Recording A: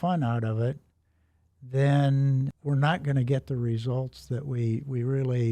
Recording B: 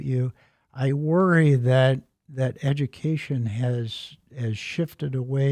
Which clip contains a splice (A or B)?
A